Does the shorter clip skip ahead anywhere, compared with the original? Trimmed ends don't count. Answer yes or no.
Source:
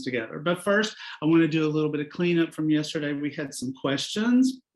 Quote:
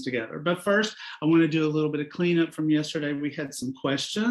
no